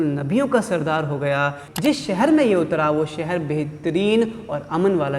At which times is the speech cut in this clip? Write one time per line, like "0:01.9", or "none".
none